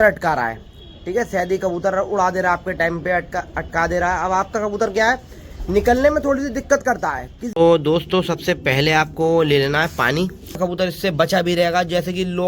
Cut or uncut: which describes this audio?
cut